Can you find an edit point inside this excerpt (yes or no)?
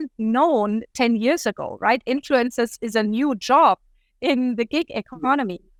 no